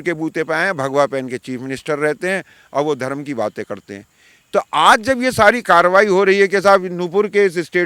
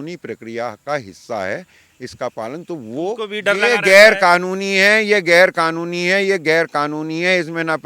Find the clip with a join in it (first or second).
second